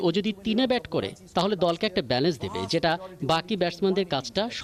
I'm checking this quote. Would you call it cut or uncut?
uncut